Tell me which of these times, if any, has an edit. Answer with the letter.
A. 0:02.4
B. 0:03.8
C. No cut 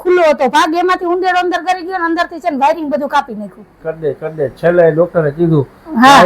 B